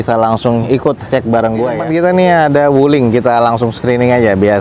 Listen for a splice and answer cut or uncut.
cut